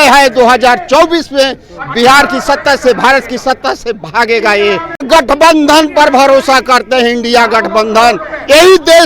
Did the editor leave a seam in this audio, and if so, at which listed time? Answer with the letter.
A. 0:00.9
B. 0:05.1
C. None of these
B